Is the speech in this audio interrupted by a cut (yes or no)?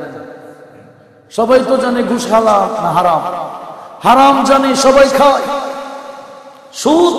no